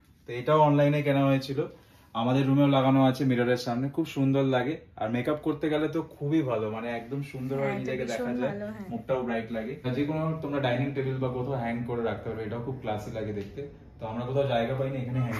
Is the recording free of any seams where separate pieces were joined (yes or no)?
no